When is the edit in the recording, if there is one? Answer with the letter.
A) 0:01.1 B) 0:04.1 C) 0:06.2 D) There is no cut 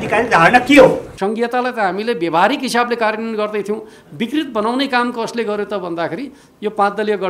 A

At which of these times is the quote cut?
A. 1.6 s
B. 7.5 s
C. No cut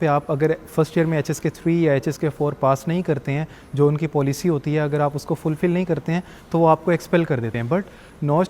B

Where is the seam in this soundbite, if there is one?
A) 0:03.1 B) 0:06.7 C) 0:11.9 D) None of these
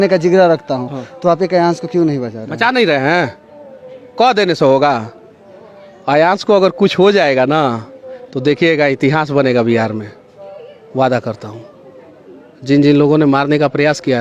D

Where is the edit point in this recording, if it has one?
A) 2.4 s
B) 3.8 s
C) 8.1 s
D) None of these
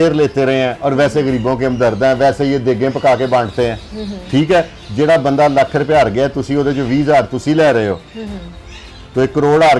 D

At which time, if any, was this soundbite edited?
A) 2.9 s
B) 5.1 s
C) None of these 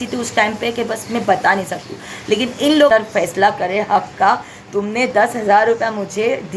A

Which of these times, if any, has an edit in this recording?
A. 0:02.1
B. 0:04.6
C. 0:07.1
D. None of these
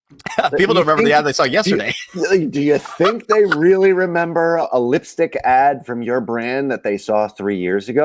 B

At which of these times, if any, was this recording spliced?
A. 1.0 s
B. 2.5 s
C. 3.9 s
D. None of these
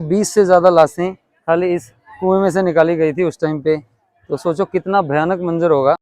D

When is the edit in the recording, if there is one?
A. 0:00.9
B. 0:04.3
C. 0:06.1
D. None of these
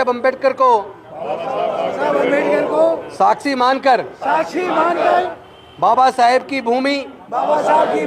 D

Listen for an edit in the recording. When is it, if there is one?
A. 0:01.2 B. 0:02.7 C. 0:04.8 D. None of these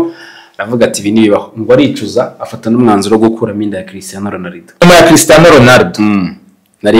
C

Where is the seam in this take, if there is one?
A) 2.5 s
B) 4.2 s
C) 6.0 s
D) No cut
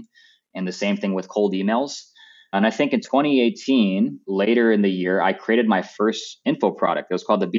B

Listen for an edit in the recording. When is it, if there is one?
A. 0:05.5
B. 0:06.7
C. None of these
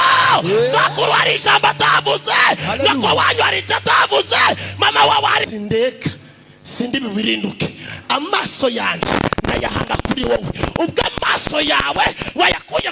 A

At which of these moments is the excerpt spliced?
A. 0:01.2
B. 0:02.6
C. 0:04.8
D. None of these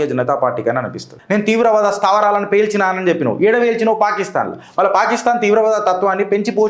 A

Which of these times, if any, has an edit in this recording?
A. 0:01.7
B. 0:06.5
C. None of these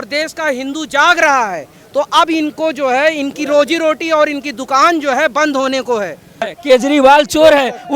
B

